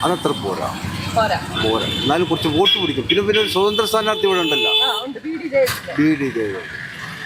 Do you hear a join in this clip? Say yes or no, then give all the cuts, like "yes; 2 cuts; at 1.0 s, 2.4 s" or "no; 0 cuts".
no; 0 cuts